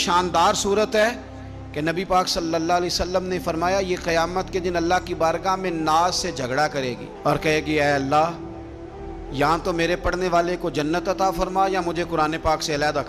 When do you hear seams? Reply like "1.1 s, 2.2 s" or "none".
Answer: none